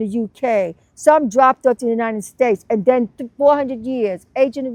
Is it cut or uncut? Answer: uncut